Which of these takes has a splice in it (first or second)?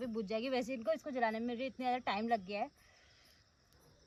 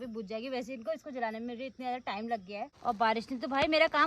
second